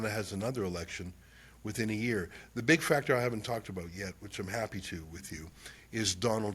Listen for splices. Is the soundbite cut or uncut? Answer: uncut